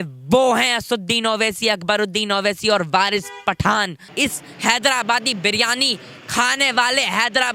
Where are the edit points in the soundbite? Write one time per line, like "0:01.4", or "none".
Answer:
0:04.1